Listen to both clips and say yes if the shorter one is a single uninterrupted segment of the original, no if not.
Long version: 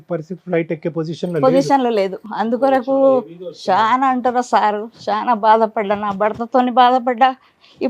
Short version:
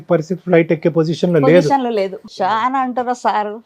no